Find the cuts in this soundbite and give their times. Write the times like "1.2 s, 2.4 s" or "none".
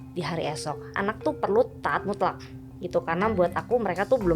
1.0 s